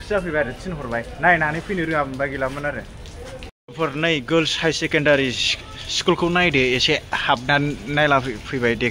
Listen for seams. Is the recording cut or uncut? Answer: cut